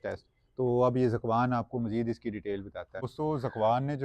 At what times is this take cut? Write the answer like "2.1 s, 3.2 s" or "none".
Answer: 3.0 s